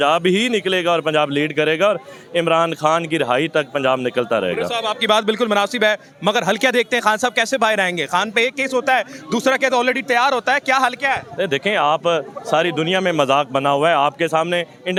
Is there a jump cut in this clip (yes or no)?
no